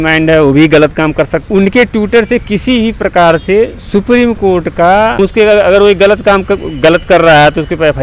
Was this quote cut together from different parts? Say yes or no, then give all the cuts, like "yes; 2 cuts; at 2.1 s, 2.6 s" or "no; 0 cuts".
yes; 2 cuts; at 1.4 s, 5.2 s